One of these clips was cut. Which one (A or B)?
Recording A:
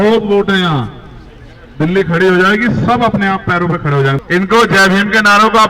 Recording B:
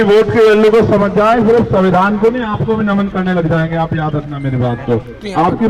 A